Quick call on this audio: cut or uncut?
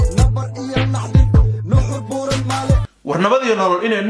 cut